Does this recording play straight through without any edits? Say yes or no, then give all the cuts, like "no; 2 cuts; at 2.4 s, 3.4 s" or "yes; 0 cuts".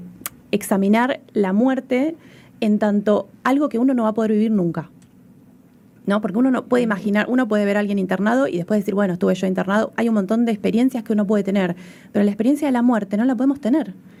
yes; 0 cuts